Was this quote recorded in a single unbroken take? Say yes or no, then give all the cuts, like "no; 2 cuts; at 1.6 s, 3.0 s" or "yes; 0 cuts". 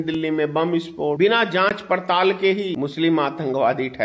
no; 2 cuts; at 1.2 s, 2.7 s